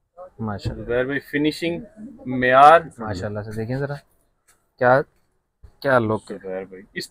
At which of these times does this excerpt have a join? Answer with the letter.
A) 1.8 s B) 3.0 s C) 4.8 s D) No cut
B